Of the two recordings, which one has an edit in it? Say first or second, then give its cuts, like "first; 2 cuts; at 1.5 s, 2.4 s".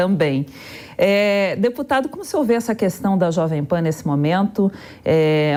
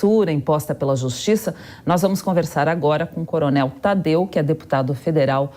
second; 1 cut; at 1.1 s